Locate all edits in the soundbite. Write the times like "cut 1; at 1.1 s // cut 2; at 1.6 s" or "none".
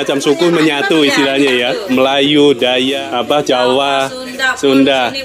cut 1; at 1.9 s